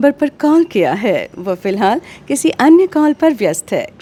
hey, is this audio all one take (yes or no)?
yes